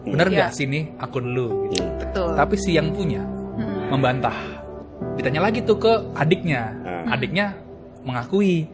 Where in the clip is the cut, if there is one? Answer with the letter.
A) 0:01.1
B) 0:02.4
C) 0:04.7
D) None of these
C